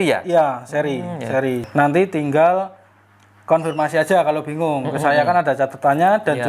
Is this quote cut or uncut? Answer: cut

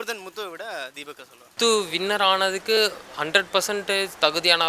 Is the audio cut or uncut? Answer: cut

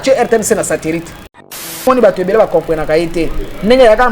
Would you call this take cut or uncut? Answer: cut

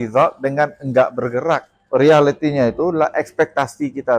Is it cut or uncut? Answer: cut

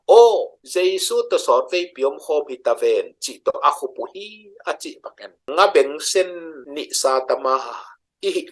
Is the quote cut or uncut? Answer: uncut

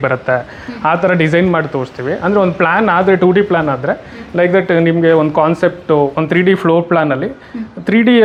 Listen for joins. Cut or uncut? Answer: uncut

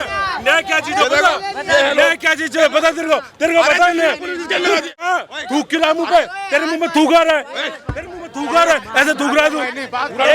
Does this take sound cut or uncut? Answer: cut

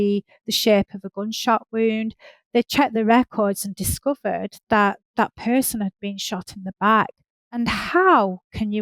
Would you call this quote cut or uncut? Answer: cut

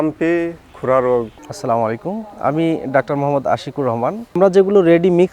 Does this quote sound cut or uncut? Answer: cut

